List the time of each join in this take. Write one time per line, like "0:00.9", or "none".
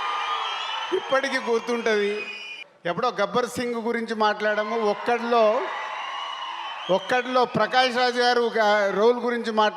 0:02.5